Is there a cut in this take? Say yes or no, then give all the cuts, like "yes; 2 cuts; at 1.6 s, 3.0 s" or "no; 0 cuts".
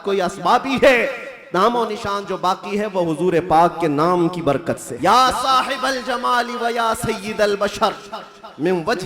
yes; 1 cut; at 4.9 s